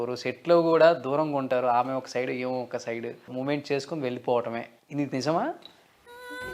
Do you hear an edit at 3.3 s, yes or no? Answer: yes